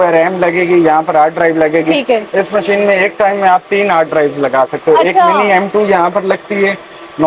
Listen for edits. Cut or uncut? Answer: uncut